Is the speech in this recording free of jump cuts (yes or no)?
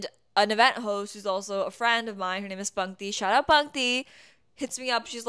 yes